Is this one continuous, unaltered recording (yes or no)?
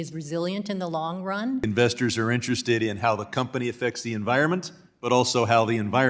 no